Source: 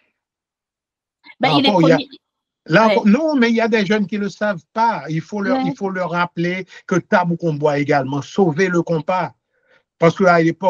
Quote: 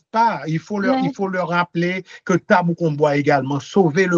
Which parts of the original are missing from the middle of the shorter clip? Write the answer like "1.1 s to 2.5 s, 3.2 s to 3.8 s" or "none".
none